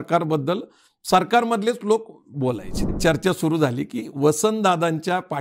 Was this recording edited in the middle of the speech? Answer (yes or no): yes